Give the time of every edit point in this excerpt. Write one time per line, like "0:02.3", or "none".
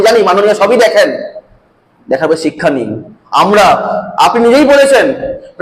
none